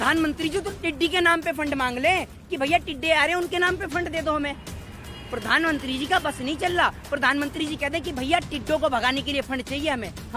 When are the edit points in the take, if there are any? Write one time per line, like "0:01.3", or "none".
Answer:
none